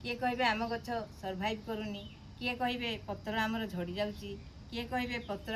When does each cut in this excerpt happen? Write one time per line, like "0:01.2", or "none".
none